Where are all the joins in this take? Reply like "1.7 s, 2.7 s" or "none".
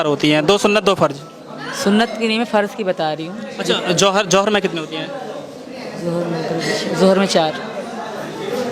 none